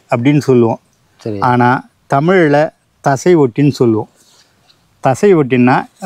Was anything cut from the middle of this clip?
no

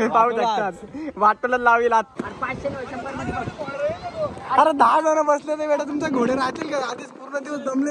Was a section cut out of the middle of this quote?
yes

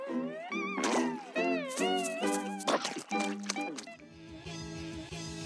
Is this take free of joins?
no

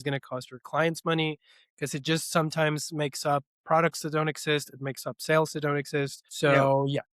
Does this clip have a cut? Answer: yes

